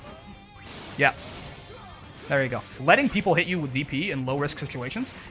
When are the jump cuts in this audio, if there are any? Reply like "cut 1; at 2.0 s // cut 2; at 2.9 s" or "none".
cut 1; at 2.7 s